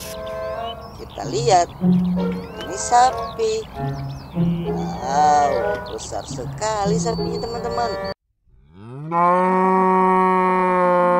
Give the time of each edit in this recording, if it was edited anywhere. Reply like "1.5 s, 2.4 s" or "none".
4.1 s, 8.1 s